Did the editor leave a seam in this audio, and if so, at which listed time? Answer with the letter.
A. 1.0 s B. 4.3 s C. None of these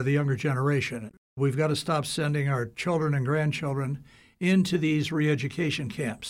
A